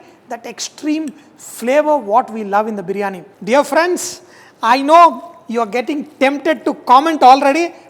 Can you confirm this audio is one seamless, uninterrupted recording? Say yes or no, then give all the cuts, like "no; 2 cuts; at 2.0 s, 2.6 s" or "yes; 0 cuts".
no; 1 cut; at 3.3 s